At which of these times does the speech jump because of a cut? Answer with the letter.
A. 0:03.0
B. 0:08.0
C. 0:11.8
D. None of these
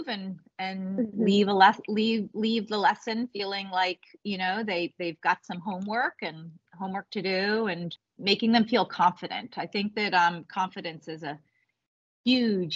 B